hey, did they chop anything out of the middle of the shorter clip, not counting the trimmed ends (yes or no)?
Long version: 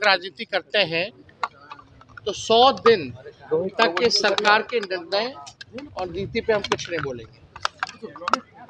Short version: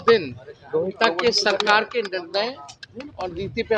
no